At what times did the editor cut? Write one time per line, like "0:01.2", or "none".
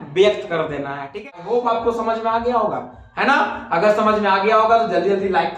0:01.2

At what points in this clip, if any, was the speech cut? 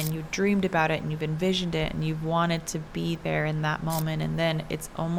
none

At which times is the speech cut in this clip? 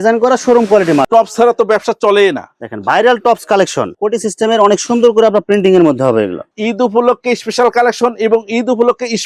0:01.1
0:03.8
0:06.5

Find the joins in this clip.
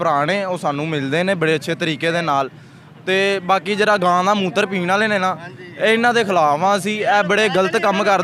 none

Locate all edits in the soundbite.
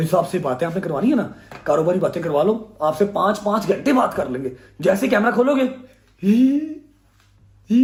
none

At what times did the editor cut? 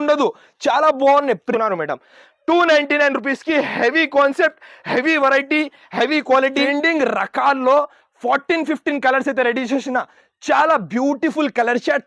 0:01.5
0:06.6

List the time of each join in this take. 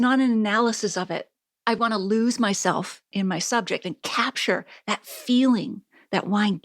0:01.8

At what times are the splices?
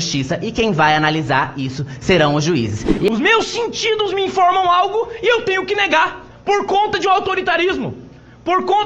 0:03.1

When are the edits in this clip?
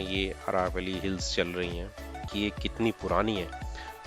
0:02.3

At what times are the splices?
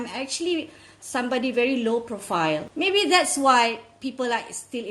0:02.7

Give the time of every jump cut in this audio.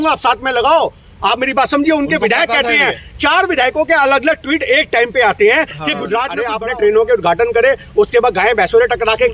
0:06.4

